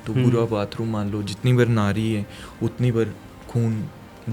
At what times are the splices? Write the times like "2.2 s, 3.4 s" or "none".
none

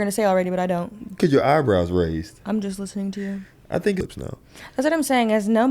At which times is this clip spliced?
4.0 s

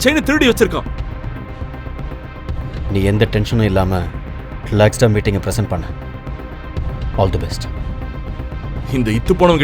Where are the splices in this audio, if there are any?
2.8 s

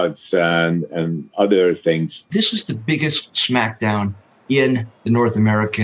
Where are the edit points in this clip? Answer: 2.2 s

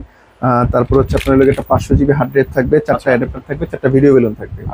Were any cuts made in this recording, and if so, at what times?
none

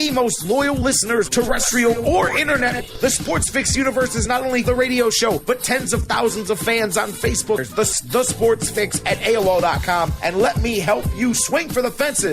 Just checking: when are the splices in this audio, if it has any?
7.6 s

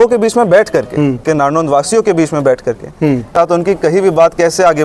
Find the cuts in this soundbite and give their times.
1.2 s, 3.3 s

